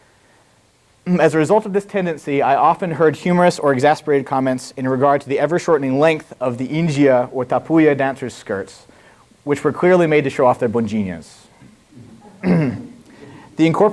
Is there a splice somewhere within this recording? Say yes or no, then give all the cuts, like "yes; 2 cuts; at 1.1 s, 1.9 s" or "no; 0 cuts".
no; 0 cuts